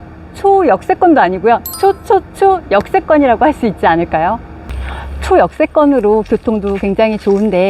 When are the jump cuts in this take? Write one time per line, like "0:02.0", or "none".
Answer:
0:05.0